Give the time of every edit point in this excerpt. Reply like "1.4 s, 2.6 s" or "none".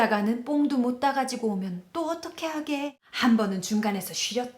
3.0 s